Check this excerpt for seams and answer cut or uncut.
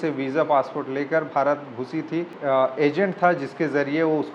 cut